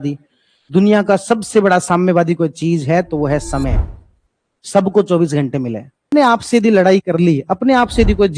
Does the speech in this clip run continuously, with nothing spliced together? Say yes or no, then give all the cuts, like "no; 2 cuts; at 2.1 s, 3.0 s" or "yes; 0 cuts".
no; 1 cut; at 6.0 s